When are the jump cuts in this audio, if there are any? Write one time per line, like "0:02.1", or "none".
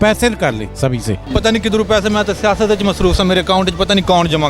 0:01.2

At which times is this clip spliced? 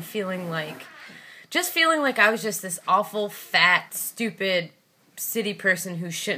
0:04.0

